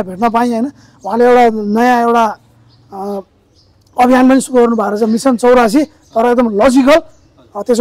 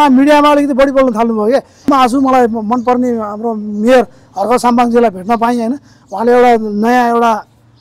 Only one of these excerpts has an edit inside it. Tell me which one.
second; 1 cut; at 1.9 s

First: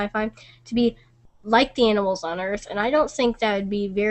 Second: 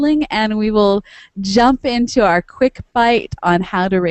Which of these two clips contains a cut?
first; 1 cut; at 1.9 s

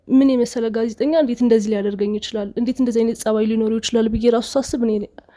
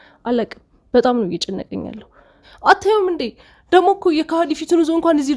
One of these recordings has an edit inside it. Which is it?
second; 1 cut; at 2.4 s

